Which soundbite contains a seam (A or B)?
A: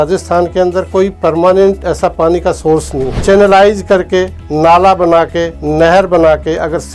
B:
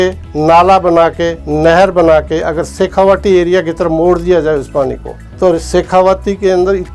A